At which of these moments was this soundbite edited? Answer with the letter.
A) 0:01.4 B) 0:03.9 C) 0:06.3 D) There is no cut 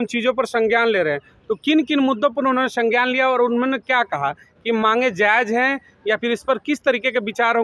D